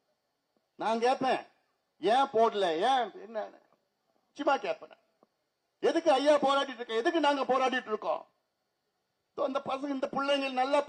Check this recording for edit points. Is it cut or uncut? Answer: uncut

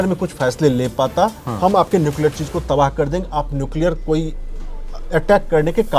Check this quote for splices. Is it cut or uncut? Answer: uncut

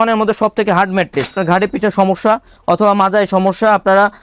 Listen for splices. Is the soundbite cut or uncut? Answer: cut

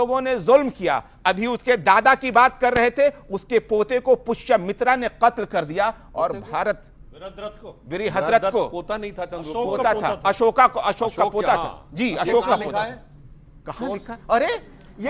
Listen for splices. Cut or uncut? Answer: uncut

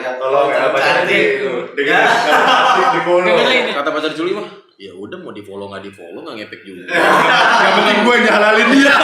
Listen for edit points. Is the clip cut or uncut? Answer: cut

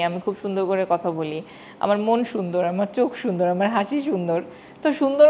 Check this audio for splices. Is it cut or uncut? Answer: uncut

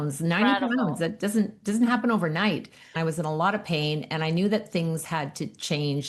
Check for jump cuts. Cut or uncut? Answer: cut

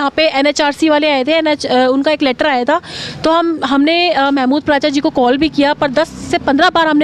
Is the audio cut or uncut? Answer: uncut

